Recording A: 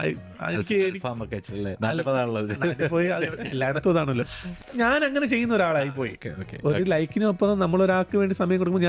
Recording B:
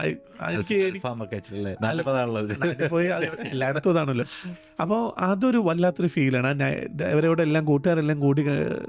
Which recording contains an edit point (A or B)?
A